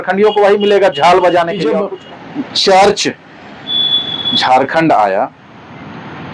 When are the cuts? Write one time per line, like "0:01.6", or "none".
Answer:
0:01.7